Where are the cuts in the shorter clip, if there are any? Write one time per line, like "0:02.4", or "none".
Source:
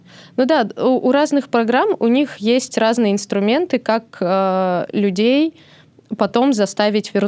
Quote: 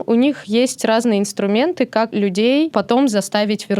0:02.2